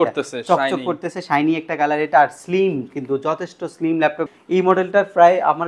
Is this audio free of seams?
no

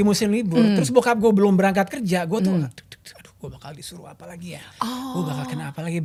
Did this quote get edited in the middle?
no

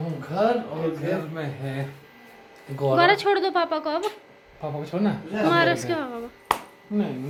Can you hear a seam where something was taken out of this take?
no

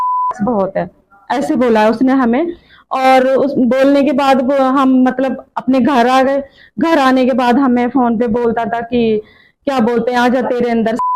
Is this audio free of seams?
yes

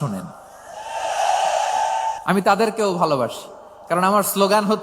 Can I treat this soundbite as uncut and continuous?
no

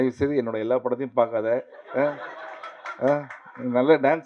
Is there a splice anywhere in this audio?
no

